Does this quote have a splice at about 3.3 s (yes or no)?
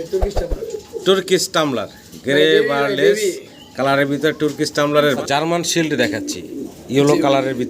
no